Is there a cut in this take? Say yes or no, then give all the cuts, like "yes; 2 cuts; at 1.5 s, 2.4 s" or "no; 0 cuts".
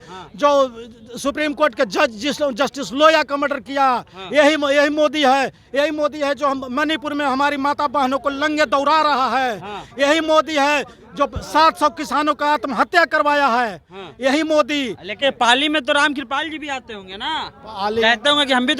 yes; 1 cut; at 15.2 s